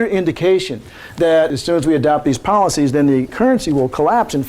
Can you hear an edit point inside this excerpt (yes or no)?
yes